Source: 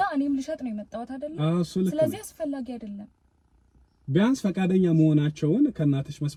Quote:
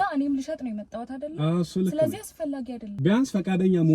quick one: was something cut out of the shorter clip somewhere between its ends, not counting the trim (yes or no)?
yes